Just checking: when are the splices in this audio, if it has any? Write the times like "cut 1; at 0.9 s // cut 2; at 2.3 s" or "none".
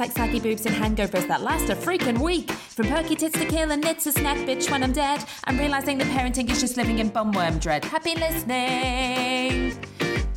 none